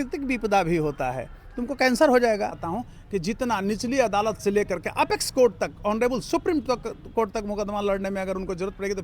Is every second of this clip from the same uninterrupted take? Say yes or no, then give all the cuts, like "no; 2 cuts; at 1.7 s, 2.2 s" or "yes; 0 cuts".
no; 1 cut; at 2.6 s